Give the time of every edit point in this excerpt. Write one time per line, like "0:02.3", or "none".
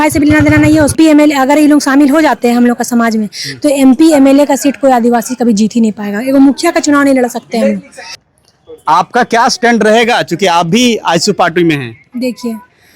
0:00.9
0:08.2